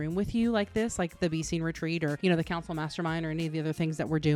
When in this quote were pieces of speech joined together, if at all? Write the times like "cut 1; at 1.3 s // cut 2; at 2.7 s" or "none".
none